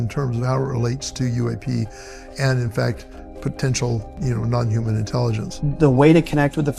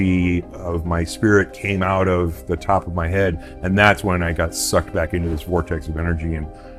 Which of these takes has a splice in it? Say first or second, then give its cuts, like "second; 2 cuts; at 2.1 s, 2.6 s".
first; 2 cuts; at 4.2 s, 5.5 s